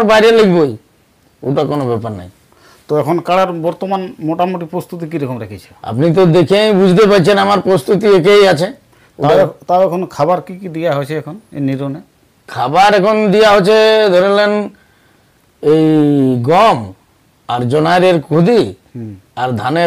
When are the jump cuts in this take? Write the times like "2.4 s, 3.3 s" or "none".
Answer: none